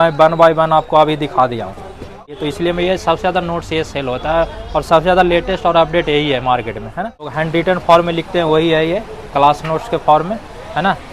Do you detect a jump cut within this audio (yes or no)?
yes